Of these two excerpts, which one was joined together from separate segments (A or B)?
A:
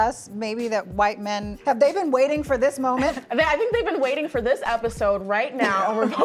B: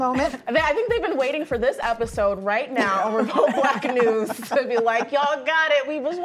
A